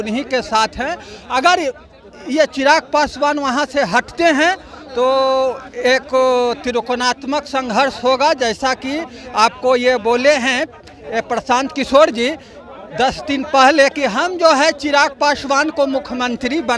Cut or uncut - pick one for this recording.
uncut